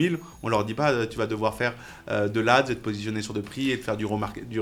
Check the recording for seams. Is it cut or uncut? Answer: uncut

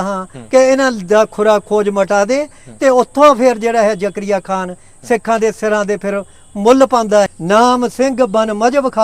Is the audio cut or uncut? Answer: cut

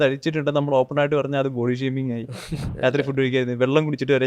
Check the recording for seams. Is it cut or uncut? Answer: cut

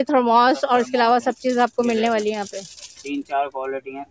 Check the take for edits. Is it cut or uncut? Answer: uncut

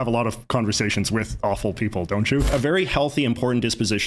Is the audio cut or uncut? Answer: cut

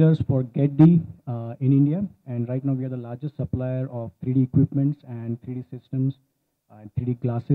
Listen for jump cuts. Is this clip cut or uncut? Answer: uncut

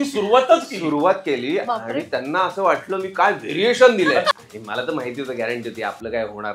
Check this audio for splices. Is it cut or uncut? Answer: cut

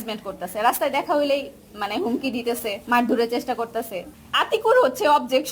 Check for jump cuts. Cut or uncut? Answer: cut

